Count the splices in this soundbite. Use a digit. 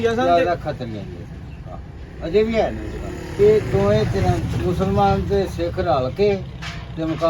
1